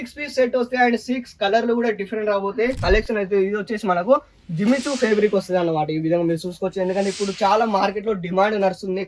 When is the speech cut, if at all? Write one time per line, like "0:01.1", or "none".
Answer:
0:02.8